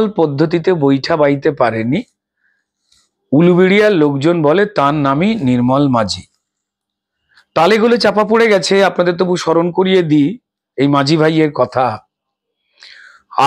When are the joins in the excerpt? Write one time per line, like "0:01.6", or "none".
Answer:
none